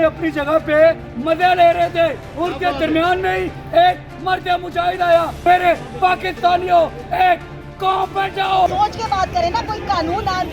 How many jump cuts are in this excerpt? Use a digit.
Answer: 3